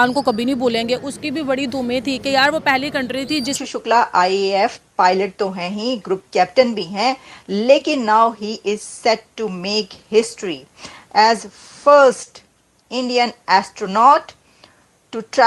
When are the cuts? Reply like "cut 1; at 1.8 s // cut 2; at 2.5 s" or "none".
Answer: cut 1; at 3.6 s